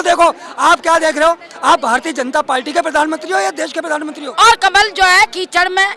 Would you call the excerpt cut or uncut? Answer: cut